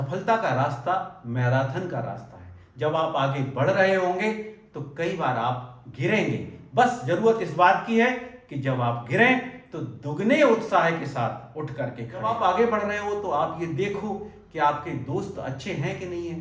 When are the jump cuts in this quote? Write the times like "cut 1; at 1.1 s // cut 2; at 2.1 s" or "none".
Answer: cut 1; at 12.3 s